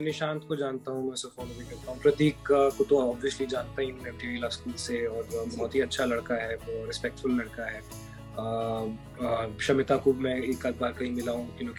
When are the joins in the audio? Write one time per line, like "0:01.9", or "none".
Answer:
none